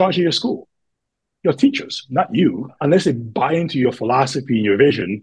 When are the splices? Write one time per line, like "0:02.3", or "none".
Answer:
0:02.8